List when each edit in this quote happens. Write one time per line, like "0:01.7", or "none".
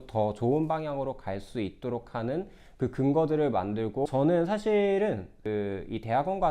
0:04.1
0:05.4